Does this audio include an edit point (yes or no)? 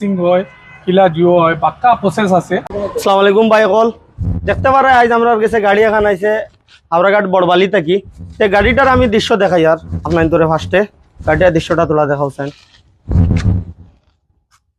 yes